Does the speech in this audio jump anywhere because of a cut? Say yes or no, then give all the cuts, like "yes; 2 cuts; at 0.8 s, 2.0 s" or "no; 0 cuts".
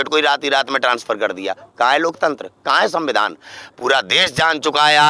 no; 0 cuts